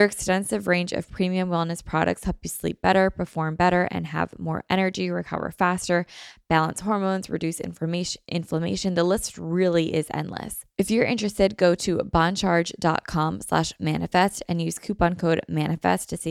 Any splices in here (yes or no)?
yes